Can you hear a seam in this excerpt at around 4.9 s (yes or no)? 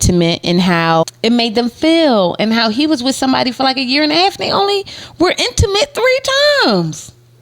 no